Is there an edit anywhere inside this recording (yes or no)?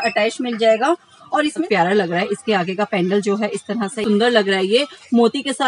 yes